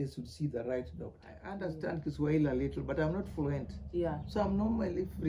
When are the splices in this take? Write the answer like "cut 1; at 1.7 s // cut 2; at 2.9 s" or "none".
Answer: cut 1; at 1.5 s